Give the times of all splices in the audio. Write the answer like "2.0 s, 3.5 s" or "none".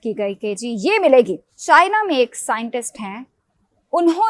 1.5 s

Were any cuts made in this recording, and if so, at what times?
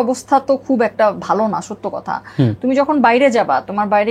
none

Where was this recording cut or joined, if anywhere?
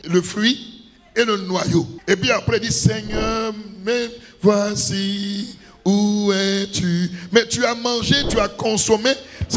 none

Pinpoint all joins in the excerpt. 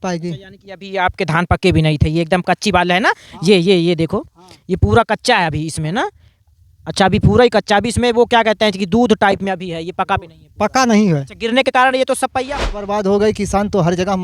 12.9 s

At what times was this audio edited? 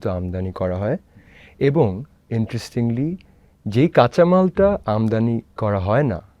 none

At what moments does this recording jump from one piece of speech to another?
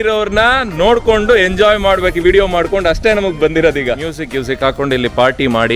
4.2 s

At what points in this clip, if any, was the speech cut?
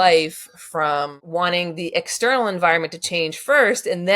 1.3 s

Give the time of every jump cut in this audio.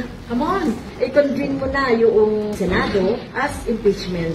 none

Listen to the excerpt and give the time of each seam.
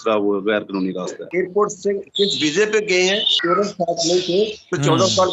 1.2 s, 3.3 s

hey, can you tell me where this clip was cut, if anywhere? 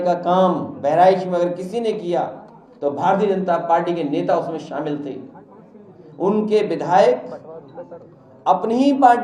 none

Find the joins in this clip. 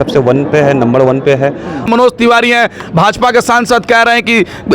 1.9 s

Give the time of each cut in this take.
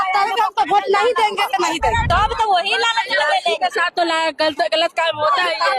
2.1 s

